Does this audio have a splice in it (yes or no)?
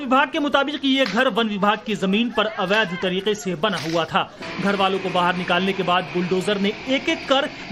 no